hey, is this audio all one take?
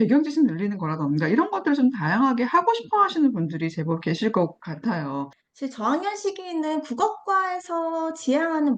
no; 1 cut; at 5.4 s

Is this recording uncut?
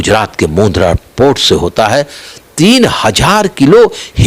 no; 1 cut; at 2.3 s

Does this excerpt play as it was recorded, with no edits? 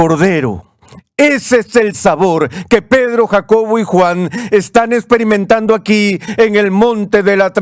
yes; 0 cuts

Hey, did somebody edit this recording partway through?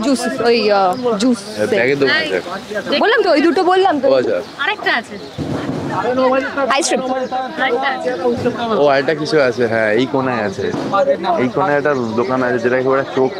no; 0 cuts

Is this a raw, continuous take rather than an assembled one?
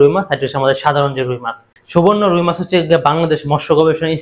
no; 1 cut; at 1.7 s

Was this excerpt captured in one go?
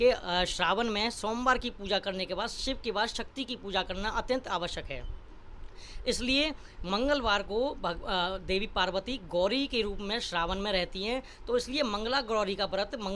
yes; 0 cuts

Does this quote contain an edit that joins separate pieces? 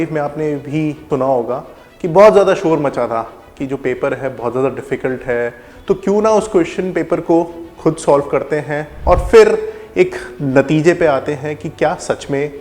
yes; 3 cuts; at 1.0 s, 5.7 s, 8.9 s

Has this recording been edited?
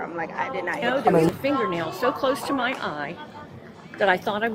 yes; 1 cut; at 1.3 s

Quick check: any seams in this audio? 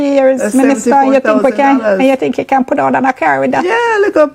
no; 0 cuts

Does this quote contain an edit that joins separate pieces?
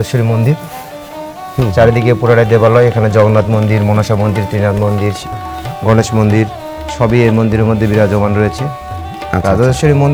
no; 0 cuts

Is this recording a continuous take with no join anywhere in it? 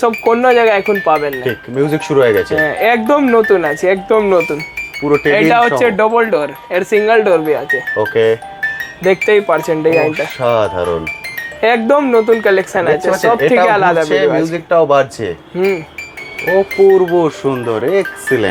yes; 0 cuts

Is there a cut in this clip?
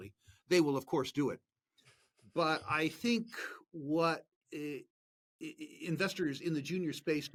no; 0 cuts

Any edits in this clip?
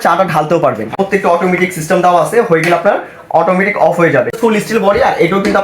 yes; 2 cuts; at 0.9 s, 4.4 s

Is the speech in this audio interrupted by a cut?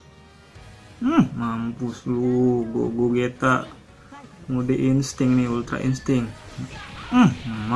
no; 0 cuts

